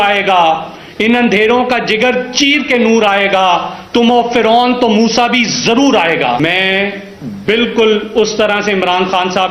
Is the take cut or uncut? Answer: cut